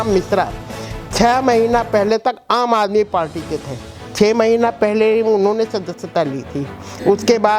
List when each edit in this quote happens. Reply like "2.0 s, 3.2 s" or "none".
none